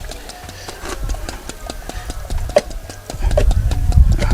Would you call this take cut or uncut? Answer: cut